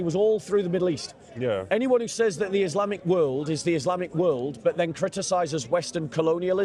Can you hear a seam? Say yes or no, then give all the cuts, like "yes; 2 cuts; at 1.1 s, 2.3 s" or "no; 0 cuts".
no; 0 cuts